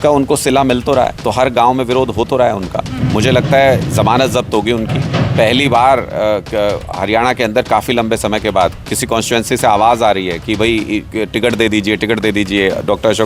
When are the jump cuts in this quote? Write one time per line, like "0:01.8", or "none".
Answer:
0:01.2